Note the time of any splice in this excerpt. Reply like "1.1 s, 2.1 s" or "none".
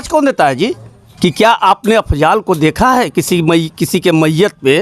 1.0 s